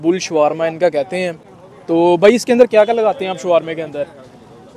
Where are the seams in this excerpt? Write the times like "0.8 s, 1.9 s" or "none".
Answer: none